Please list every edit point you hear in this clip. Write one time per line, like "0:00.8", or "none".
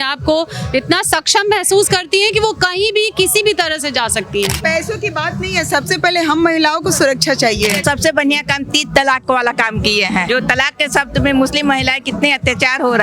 0:04.6
0:07.8
0:10.3